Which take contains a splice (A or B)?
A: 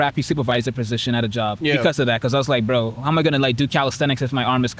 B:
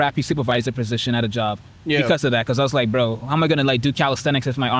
A